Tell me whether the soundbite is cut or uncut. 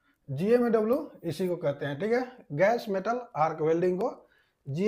uncut